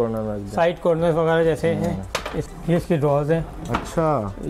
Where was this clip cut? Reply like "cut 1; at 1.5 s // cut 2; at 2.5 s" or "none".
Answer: cut 1; at 2.4 s